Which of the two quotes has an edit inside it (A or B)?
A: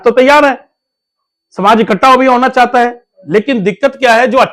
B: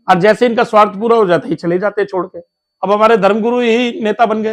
B